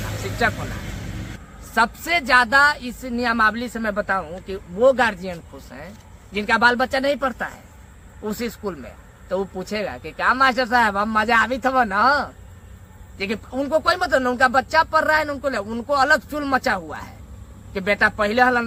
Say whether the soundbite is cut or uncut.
uncut